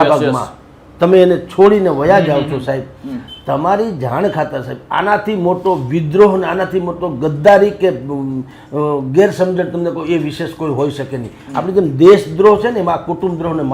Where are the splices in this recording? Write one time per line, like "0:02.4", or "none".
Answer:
none